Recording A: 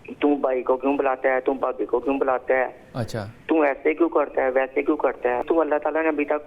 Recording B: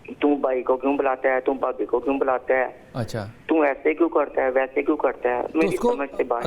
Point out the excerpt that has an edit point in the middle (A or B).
A